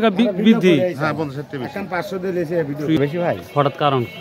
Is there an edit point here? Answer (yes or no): yes